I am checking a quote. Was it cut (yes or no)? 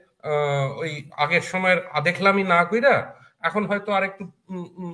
no